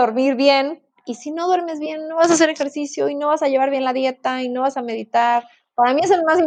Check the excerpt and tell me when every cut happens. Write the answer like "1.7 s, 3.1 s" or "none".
none

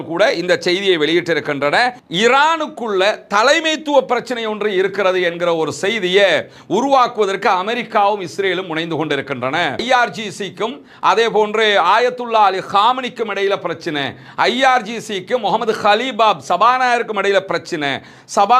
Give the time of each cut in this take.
2.0 s

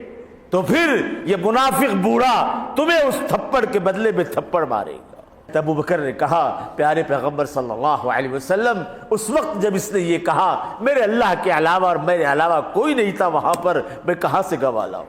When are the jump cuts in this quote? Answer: 5.5 s

